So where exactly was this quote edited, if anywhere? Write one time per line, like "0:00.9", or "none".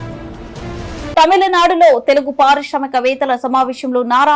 0:01.1